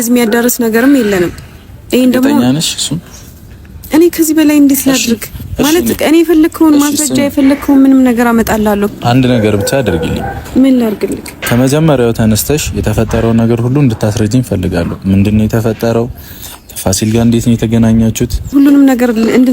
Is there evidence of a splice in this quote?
yes; 3 cuts; at 8.9 s, 11.4 s, 18.5 s

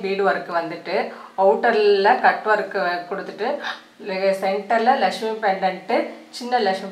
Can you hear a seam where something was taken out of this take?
no; 0 cuts

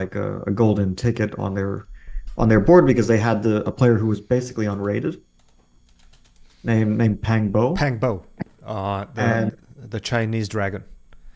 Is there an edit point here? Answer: no; 0 cuts

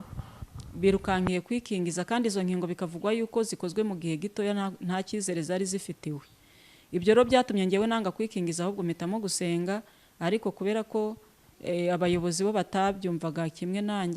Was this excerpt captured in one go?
yes; 0 cuts

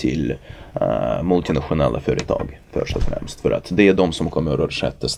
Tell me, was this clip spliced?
no; 0 cuts

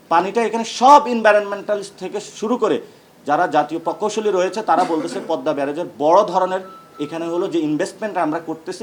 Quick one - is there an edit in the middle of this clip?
no; 0 cuts

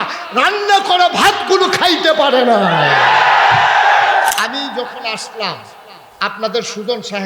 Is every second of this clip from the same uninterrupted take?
no; 1 cut; at 4.3 s

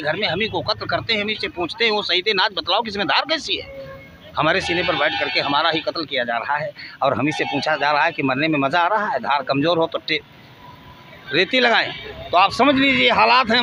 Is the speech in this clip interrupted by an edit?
no; 0 cuts

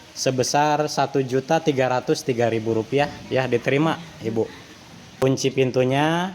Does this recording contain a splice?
yes; 1 cut; at 5.2 s

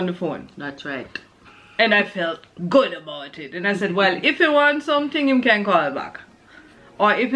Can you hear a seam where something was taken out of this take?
no; 0 cuts

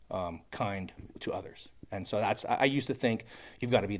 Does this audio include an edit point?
no; 0 cuts

